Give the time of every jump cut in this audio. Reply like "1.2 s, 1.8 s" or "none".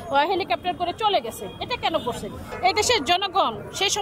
2.4 s